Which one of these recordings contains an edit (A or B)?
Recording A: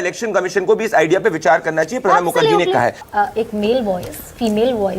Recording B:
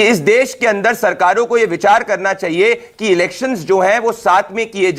A